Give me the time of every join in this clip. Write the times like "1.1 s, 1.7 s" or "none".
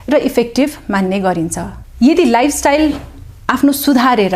1.8 s